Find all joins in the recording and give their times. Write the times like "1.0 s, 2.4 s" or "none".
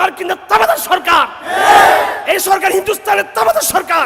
none